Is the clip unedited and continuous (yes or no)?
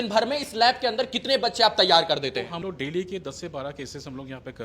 no